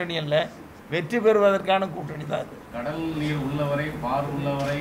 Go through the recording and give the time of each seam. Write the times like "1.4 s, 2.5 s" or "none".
2.7 s